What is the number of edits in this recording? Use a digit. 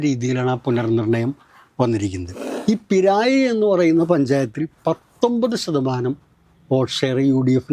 1